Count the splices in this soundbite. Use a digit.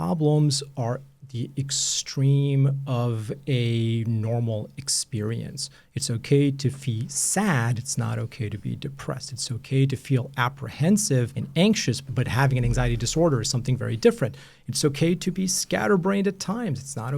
2